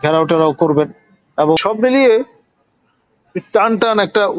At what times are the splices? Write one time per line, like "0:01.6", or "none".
0:01.6